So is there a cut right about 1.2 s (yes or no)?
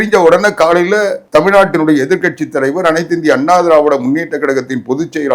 yes